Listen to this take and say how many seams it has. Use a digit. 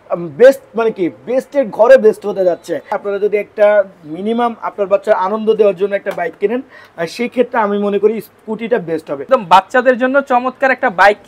2